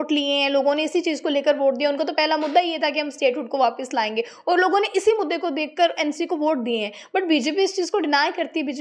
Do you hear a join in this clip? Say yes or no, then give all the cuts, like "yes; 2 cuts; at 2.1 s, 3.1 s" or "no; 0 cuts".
no; 0 cuts